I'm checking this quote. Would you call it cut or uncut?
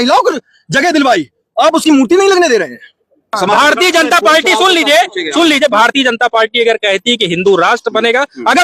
cut